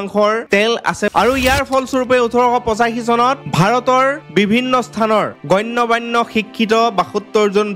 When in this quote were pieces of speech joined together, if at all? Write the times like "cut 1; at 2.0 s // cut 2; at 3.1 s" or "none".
cut 1; at 1.1 s